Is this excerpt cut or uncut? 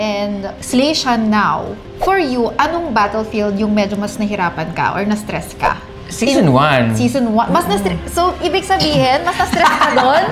uncut